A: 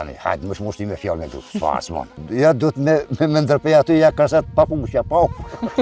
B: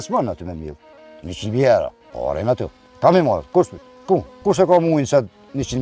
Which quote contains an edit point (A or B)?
B